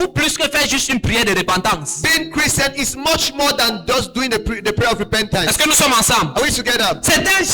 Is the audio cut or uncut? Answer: uncut